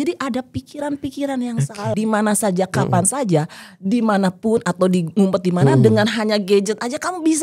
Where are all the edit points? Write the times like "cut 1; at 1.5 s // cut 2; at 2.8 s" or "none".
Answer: cut 1; at 1.9 s